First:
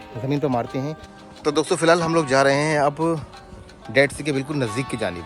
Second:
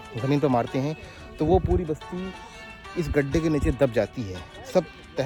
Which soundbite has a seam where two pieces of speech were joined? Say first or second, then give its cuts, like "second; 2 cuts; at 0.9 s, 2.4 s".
first; 1 cut; at 1.2 s